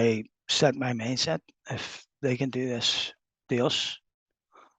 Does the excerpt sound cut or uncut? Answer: uncut